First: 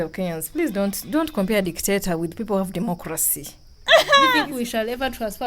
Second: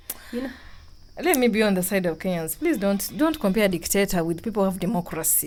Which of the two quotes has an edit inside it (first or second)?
first